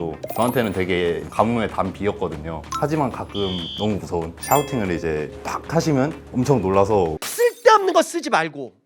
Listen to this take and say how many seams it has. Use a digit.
2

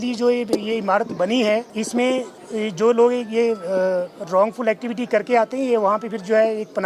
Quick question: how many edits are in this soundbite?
2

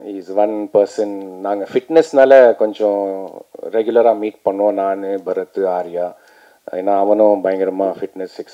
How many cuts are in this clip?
0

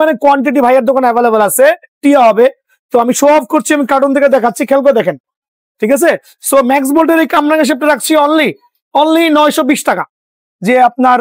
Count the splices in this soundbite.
2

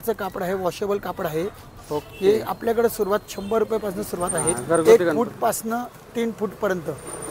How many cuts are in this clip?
1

